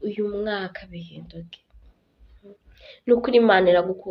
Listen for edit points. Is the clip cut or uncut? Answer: uncut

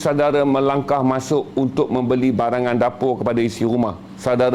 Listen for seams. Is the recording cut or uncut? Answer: uncut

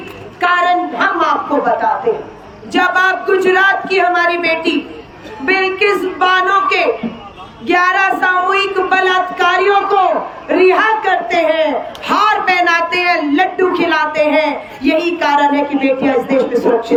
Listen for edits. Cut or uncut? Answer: uncut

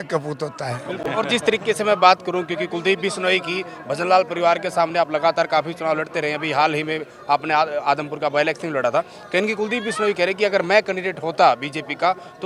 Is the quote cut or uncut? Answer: uncut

